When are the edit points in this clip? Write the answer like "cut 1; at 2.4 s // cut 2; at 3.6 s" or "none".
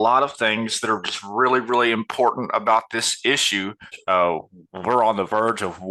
cut 1; at 3.9 s

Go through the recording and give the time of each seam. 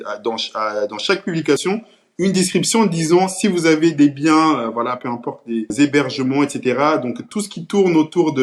cut 1; at 5.7 s

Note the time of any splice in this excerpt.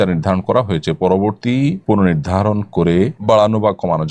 cut 1; at 1.5 s // cut 2; at 3.2 s

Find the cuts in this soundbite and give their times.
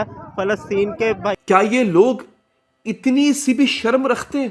cut 1; at 1.4 s

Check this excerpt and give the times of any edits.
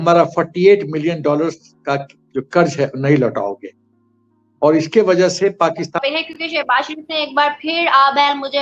cut 1; at 5.9 s

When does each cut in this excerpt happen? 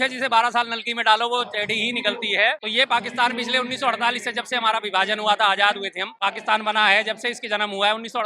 cut 1; at 2.6 s // cut 2; at 6.1 s

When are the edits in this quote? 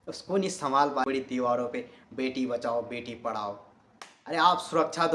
cut 1; at 1.0 s

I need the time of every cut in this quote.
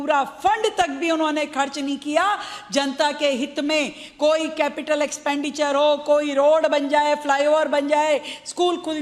cut 1; at 1.7 s // cut 2; at 7.7 s

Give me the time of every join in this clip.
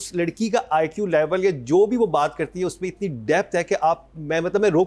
none

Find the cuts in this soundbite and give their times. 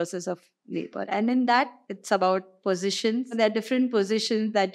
cut 1; at 1.9 s // cut 2; at 3.3 s

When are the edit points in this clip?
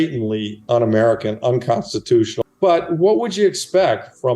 cut 1; at 2.3 s

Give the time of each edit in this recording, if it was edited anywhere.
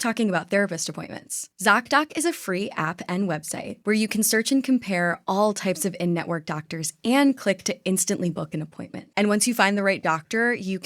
cut 1; at 9.0 s

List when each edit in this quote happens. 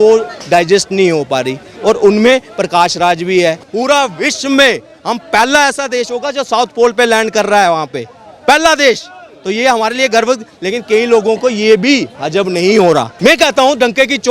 cut 1; at 3.7 s // cut 2; at 13.1 s

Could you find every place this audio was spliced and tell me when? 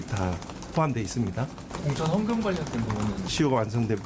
cut 1; at 1.7 s // cut 2; at 3.3 s

